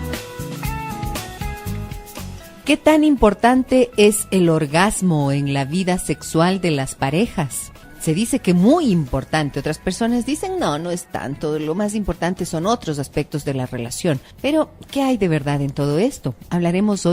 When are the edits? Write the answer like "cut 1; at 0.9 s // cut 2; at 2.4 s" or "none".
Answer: none